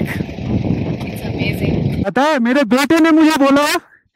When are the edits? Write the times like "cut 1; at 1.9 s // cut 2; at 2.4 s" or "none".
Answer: cut 1; at 2.1 s